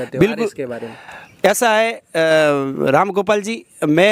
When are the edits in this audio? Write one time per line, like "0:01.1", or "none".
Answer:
none

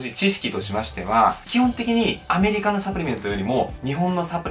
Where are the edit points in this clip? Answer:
none

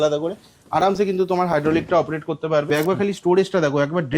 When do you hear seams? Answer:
0:02.7

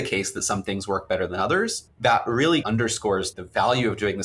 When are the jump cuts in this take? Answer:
0:01.8
0:02.9

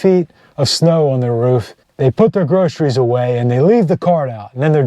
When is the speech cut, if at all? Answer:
0:01.8

